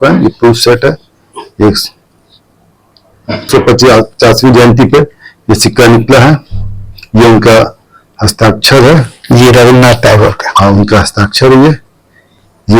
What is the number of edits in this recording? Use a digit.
1